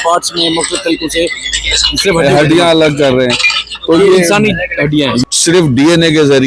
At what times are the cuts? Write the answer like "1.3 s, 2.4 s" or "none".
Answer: 5.2 s